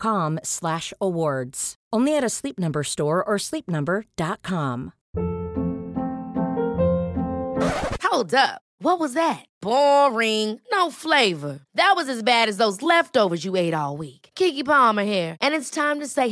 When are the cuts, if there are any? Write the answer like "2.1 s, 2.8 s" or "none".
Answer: 5.0 s

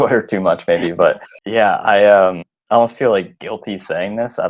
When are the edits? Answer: 1.3 s, 2.5 s

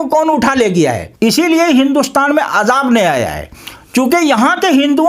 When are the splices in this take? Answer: 1.1 s

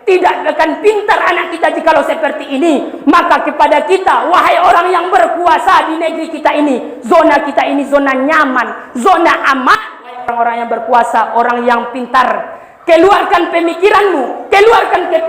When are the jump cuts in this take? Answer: 10.3 s

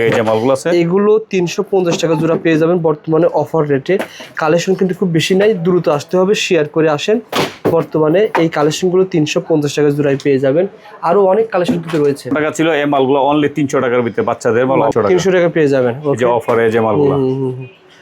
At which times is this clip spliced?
15.0 s

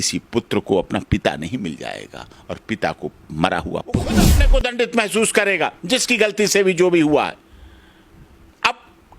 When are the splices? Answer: 4.2 s

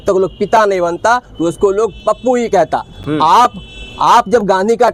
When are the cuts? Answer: none

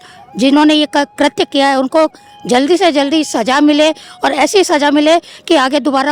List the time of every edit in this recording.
none

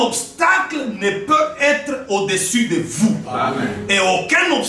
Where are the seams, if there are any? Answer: none

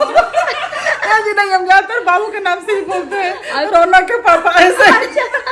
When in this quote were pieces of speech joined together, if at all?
none

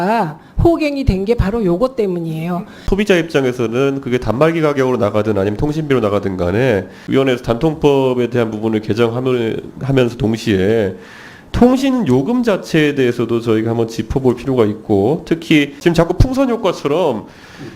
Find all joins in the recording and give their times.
2.8 s, 7.0 s, 15.8 s

